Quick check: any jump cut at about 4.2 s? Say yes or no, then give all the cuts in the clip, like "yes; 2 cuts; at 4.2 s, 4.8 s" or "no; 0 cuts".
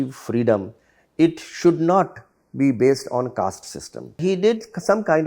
yes; 1 cut; at 4.2 s